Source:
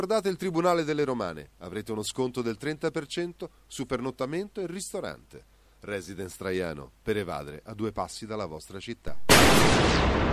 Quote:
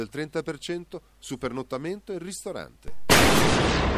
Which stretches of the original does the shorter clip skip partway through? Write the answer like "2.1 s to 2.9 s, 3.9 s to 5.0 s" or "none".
5.4 s to 9.1 s